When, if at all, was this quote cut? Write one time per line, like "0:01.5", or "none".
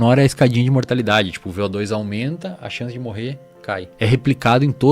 0:03.9